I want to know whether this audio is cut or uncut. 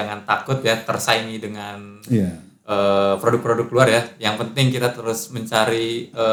uncut